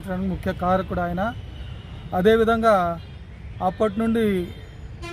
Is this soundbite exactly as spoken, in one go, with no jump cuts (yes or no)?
yes